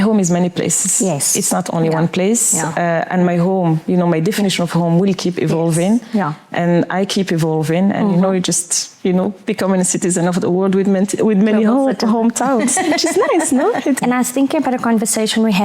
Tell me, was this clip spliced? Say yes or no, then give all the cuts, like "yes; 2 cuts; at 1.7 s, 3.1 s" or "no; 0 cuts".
yes; 1 cut; at 14.0 s